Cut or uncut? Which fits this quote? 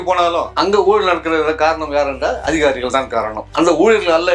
uncut